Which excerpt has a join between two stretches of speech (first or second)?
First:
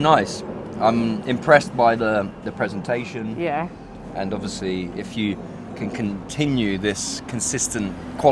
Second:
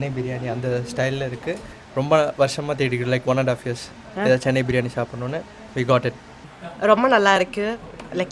second